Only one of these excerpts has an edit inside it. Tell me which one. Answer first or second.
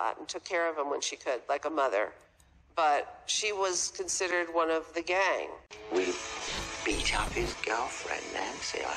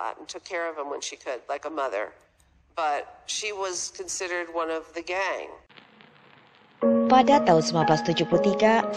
first